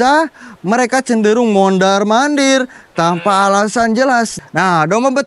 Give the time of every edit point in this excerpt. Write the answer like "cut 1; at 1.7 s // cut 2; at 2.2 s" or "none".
cut 1; at 4.4 s